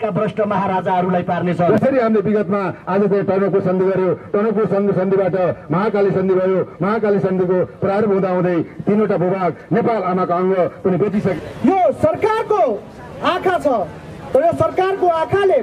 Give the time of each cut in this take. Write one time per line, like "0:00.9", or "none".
0:01.7
0:11.4